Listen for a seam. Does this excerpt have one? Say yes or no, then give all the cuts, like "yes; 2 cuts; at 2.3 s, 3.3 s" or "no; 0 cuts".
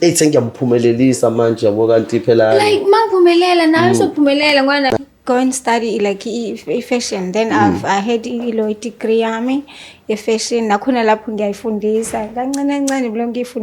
yes; 1 cut; at 4.9 s